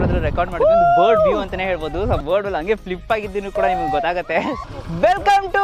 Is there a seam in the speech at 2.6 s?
no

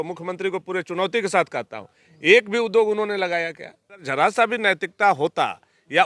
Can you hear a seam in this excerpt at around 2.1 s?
no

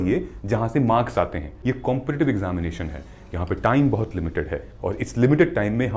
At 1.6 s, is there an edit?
yes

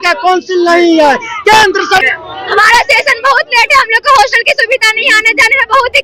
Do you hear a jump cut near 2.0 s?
yes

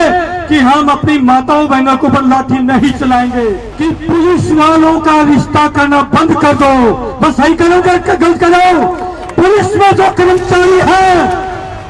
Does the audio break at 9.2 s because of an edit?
no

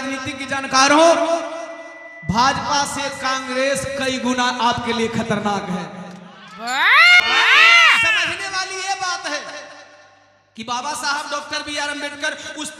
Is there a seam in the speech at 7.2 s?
yes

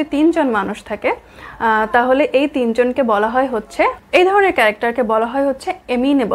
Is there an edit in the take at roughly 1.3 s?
no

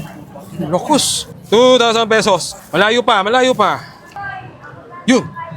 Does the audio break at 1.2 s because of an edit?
yes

